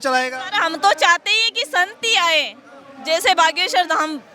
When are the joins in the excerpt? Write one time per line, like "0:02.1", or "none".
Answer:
none

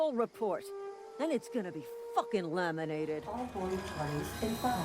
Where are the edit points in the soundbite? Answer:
0:03.3

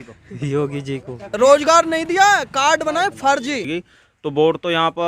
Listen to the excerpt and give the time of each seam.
0:01.3
0:03.7

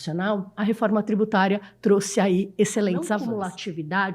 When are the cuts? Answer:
0:03.2

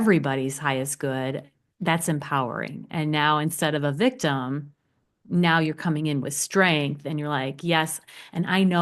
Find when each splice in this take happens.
none

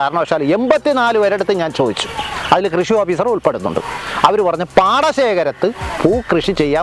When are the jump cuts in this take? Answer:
none

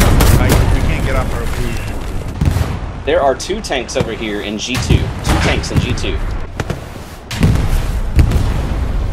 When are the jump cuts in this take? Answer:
0:02.2
0:06.4

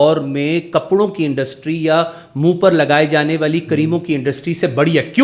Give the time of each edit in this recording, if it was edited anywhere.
none

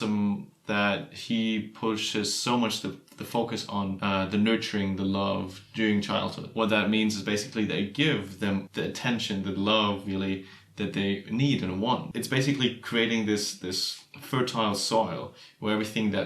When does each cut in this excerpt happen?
0:04.0
0:06.5
0:08.7
0:12.1

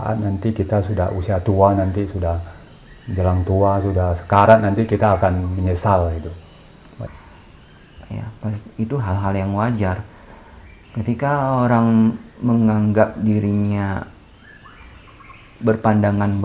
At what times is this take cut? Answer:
0:07.1

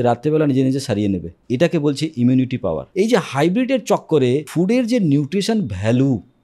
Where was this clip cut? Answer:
0:01.3
0:02.8
0:04.5

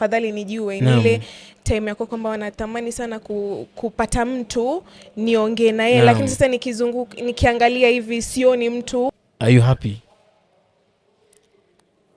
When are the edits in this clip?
0:09.2

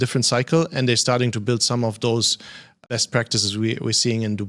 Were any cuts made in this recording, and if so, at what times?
0:02.8

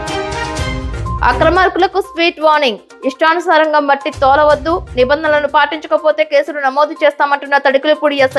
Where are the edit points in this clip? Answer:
0:01.2

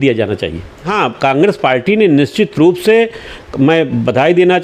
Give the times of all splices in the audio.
0:00.9

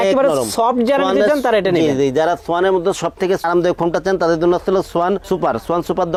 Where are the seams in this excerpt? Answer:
none

